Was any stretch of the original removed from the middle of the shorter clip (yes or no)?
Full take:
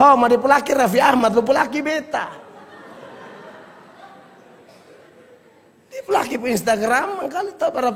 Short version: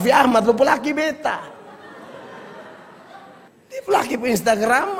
yes